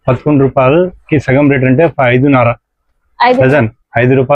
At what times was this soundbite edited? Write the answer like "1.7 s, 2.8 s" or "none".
none

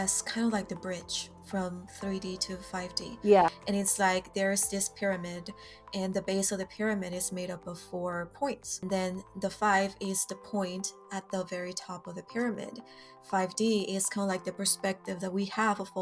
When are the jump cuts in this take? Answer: 3.6 s, 8.8 s

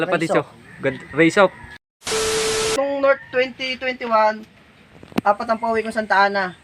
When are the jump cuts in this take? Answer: 1.7 s, 2.7 s

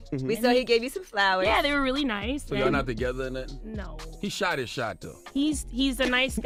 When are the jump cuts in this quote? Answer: none

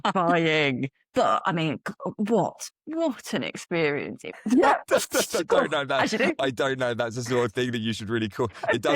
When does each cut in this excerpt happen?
4.4 s

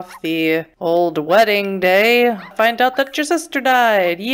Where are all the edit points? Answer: 2.5 s

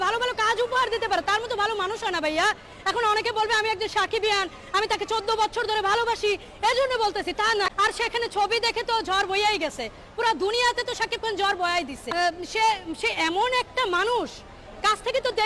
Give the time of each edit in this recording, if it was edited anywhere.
7.8 s, 12.1 s

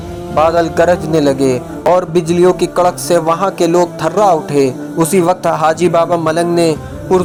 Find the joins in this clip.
none

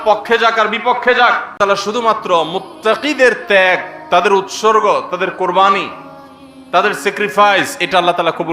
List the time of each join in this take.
1.6 s

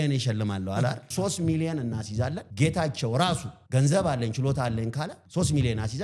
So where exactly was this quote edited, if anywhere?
1.0 s, 2.4 s, 3.5 s, 5.2 s

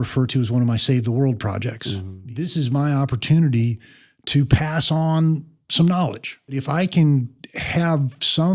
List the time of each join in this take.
2.1 s, 6.5 s

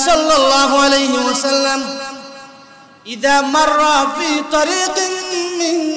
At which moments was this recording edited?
none

